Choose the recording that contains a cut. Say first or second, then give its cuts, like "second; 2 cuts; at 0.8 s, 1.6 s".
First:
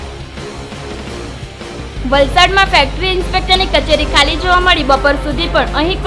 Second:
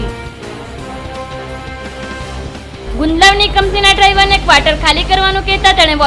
first; 1 cut; at 1.9 s